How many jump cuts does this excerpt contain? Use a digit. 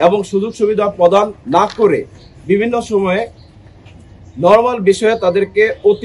0